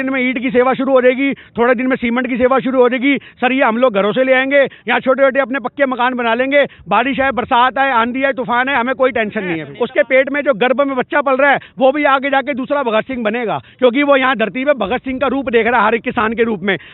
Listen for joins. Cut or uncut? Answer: cut